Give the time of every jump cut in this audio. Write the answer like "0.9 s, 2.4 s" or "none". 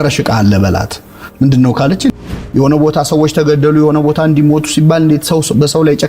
2.1 s